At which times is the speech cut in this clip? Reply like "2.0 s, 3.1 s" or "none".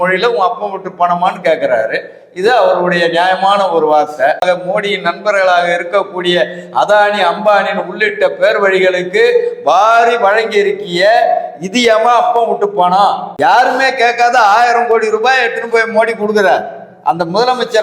4.4 s, 13.3 s